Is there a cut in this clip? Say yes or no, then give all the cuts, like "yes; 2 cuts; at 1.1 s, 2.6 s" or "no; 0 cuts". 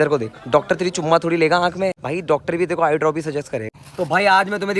yes; 2 cuts; at 2.1 s, 3.7 s